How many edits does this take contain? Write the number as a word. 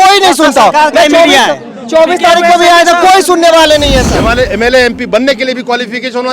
one